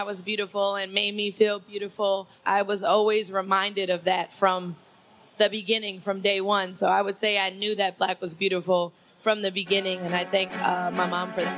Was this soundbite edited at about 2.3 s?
yes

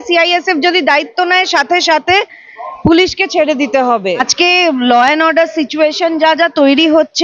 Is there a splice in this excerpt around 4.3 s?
yes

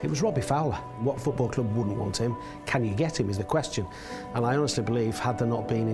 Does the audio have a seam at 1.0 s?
yes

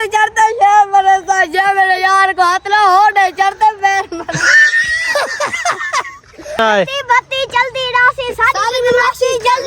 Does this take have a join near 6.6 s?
yes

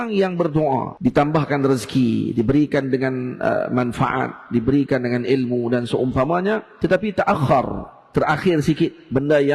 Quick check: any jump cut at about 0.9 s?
yes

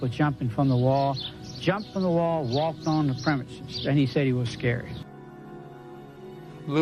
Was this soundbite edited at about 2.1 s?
yes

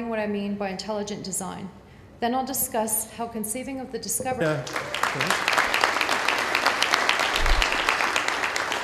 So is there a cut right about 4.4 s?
no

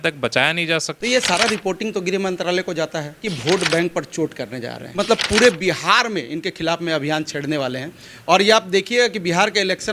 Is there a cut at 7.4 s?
no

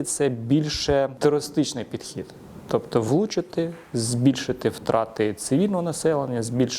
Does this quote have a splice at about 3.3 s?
no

